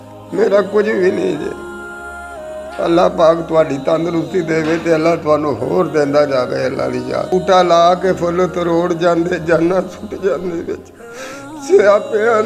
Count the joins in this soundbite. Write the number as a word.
three